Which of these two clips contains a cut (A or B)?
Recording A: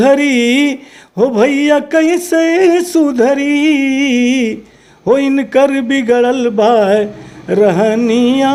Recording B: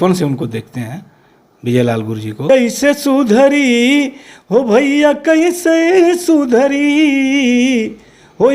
B